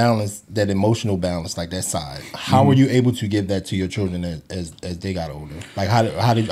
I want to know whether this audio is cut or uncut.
uncut